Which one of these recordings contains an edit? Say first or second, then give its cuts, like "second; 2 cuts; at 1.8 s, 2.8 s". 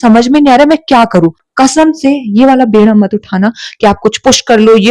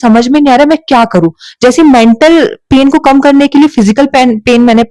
first; 1 cut; at 1.4 s